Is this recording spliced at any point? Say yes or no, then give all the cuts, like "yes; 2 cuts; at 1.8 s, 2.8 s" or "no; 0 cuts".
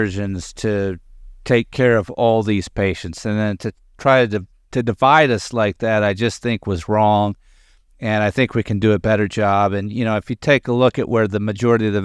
no; 0 cuts